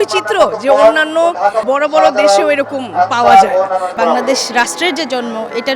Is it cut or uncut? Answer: cut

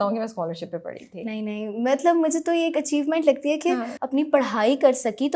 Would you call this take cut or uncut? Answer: cut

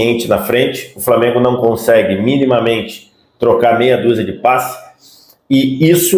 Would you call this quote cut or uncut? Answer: uncut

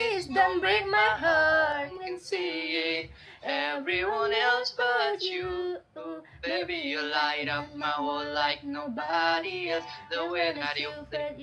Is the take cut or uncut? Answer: cut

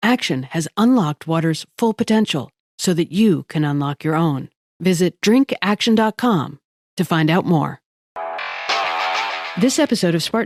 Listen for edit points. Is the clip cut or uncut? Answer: uncut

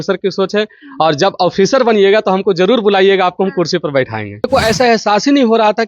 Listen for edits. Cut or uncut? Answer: cut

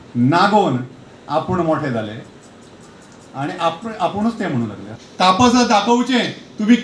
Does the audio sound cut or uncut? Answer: cut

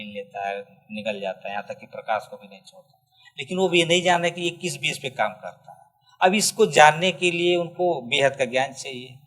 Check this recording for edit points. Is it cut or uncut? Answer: uncut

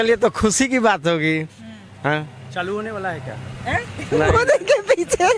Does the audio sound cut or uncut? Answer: uncut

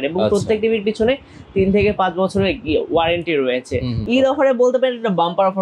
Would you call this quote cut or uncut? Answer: cut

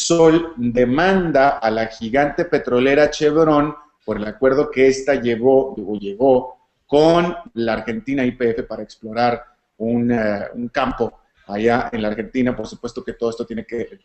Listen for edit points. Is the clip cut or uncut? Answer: cut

